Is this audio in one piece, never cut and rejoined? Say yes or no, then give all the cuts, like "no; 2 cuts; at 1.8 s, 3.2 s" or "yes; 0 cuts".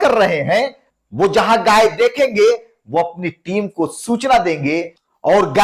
yes; 0 cuts